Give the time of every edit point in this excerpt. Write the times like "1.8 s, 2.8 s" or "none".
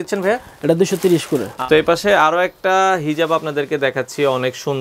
1.5 s

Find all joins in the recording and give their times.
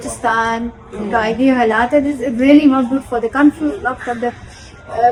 none

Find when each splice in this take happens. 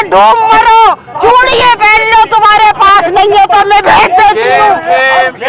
none

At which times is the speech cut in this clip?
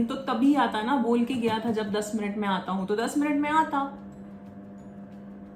none

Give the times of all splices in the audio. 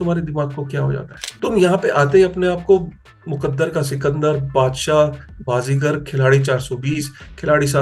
1.2 s

